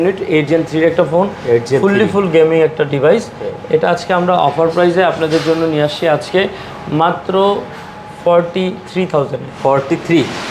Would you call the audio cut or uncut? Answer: uncut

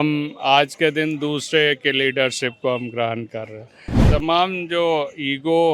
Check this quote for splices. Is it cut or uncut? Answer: cut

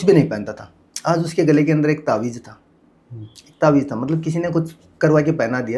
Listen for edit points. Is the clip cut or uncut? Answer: uncut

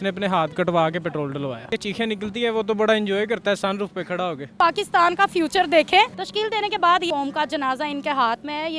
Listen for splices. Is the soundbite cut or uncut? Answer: cut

